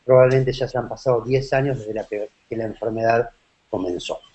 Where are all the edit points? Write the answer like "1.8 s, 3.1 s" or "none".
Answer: 2.7 s